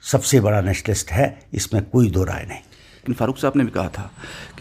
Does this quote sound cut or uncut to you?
cut